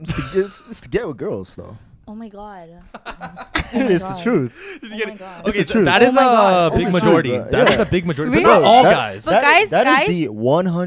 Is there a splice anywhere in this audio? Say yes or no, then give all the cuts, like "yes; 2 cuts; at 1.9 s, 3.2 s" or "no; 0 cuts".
no; 0 cuts